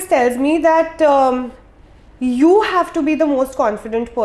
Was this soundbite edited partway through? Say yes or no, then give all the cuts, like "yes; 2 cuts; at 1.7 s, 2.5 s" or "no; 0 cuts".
no; 0 cuts